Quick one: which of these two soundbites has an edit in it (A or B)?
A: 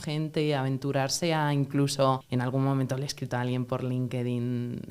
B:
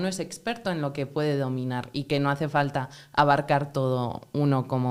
A